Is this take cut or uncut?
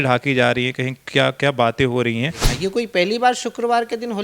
cut